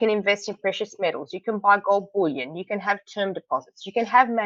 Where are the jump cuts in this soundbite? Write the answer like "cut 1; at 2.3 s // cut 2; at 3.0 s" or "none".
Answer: none